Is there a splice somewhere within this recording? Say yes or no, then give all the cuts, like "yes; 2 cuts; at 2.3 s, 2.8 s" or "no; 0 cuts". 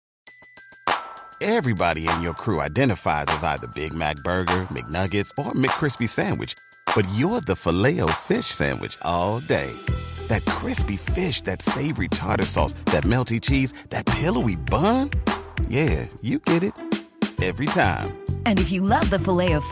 no; 0 cuts